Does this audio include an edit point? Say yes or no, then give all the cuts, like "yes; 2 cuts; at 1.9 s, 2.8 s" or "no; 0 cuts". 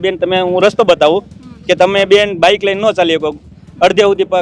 no; 0 cuts